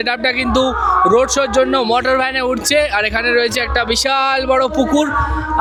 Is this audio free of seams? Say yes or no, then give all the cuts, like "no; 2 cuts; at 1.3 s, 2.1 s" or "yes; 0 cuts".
yes; 0 cuts